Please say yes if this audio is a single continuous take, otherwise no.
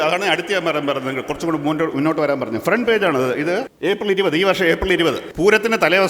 no